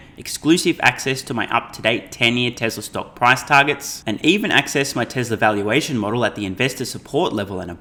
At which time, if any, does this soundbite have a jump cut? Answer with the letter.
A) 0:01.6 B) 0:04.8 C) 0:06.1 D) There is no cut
D